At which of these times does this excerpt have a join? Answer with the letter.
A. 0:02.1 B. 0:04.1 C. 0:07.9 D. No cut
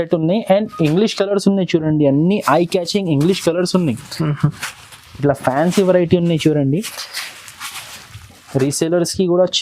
D